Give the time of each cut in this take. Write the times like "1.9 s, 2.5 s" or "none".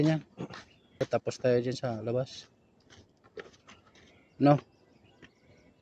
1.0 s

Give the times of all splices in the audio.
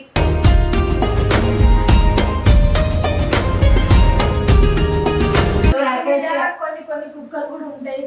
5.7 s

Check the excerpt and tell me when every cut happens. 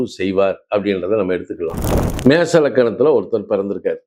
2.0 s

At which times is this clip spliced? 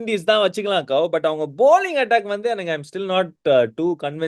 none

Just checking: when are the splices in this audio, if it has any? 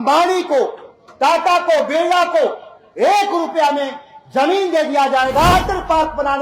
5.5 s

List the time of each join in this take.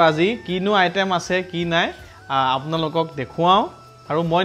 none

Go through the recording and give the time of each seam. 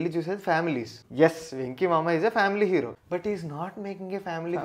1.0 s, 3.0 s

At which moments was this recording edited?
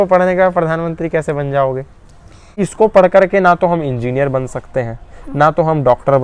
2.5 s

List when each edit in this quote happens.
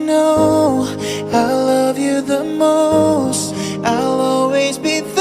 3.7 s

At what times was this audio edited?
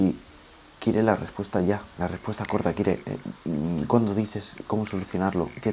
none

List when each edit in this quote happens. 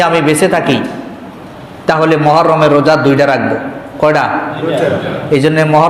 none

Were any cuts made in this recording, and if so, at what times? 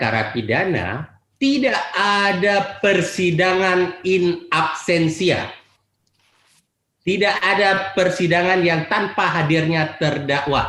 none

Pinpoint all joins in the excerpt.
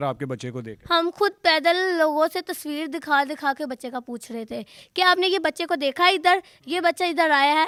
none

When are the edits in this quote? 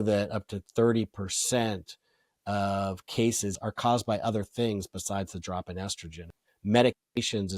3.5 s, 6.3 s

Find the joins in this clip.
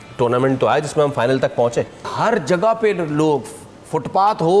2.1 s

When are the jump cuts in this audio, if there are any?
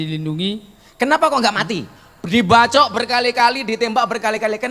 none

